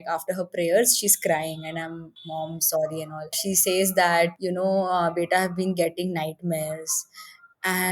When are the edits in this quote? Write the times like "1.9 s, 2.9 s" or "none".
2.1 s, 3.4 s, 4.3 s